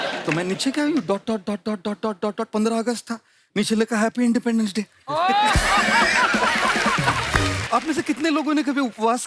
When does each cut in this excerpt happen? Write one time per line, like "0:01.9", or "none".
0:07.6